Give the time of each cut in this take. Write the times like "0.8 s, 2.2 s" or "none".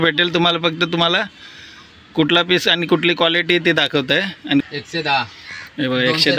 4.6 s